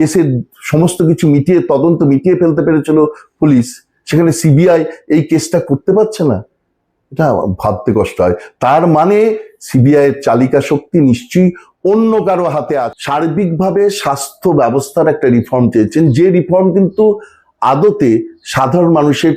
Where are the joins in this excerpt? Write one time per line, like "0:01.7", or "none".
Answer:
0:12.9